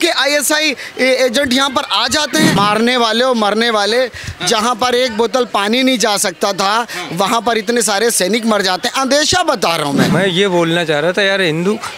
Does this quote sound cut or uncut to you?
cut